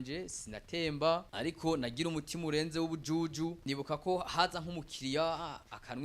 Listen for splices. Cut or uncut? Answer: cut